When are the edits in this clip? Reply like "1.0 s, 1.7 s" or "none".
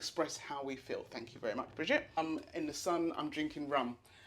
2.2 s